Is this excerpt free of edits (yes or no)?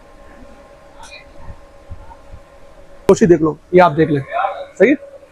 no